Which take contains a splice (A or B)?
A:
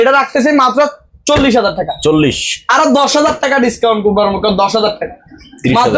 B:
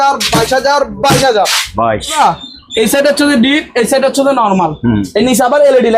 B